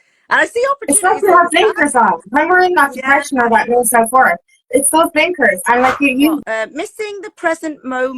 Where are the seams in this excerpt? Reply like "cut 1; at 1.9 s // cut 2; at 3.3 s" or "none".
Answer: cut 1; at 6.4 s